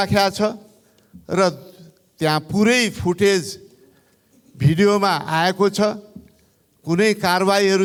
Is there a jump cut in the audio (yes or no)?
no